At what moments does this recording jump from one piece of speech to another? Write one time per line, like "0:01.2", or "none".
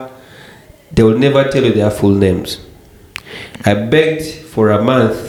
none